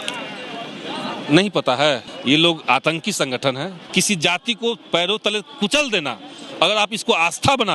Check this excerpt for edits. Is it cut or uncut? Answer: cut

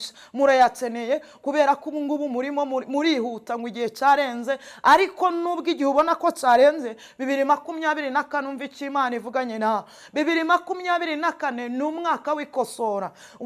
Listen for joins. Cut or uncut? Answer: uncut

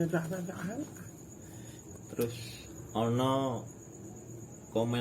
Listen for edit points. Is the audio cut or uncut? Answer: cut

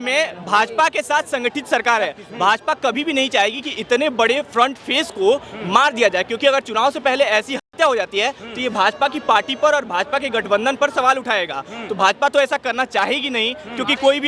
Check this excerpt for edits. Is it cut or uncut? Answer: uncut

